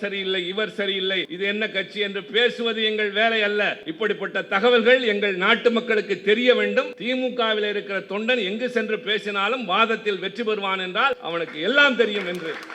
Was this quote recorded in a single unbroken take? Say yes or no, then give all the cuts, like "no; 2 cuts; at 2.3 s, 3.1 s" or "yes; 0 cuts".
no; 4 cuts; at 1.3 s, 3.8 s, 7.0 s, 11.2 s